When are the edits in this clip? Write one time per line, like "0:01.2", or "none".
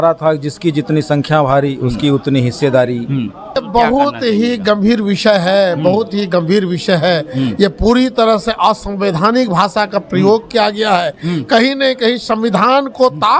0:03.6